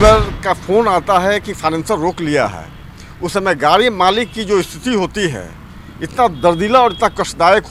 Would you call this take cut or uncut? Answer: uncut